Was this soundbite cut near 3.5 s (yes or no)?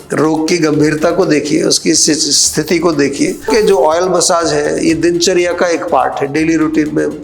yes